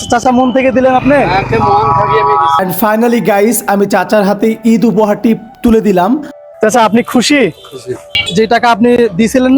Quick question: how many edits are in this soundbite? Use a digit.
2